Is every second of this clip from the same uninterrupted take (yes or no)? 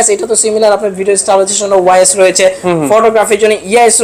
yes